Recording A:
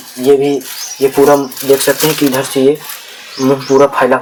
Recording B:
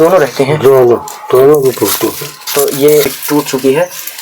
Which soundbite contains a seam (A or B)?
B